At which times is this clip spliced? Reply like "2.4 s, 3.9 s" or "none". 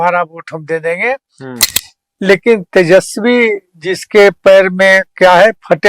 1.5 s